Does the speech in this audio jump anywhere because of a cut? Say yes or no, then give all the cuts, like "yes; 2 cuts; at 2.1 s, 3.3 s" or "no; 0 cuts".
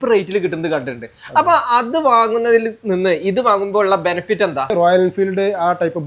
yes; 1 cut; at 4.6 s